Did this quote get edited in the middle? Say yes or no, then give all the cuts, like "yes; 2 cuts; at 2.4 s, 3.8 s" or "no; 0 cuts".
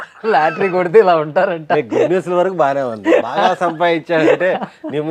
no; 0 cuts